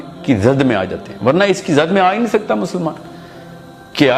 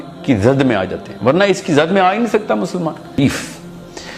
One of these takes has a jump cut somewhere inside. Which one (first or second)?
second